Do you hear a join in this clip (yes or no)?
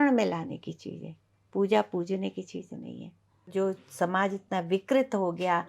yes